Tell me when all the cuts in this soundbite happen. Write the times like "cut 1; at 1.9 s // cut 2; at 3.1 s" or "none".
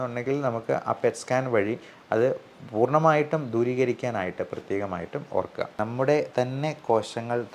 cut 1; at 5.7 s